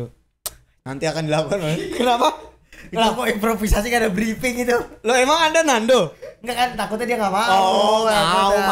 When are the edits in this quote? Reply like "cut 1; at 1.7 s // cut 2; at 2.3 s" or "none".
none